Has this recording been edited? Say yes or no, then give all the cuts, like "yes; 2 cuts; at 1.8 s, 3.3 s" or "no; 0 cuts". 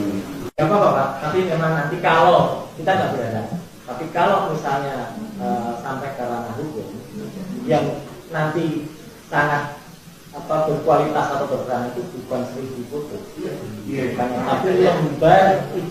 no; 0 cuts